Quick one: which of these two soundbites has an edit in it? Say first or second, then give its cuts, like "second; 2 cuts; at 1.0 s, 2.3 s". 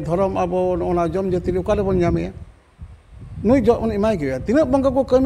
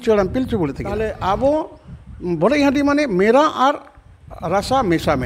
second; 1 cut; at 1.1 s